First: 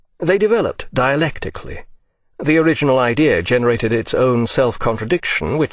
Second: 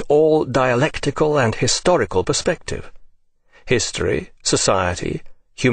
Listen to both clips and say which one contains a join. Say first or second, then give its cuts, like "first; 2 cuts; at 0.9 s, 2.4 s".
second; 1 cut; at 2.0 s